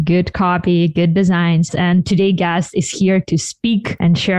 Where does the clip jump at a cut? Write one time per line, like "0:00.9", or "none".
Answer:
0:01.7